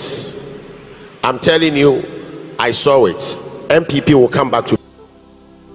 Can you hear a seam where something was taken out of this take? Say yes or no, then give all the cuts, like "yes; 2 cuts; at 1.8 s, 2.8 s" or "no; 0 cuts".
yes; 1 cut; at 4.8 s